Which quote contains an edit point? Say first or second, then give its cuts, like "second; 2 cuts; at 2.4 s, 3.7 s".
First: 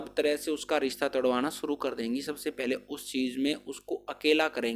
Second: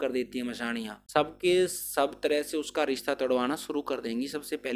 second; 1 cut; at 1.0 s